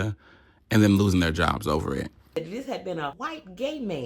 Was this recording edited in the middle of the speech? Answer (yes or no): yes